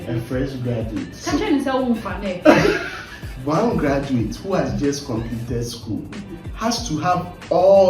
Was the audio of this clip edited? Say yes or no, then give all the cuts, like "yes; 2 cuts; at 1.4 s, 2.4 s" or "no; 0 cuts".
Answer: yes; 2 cuts; at 1.1 s, 3.3 s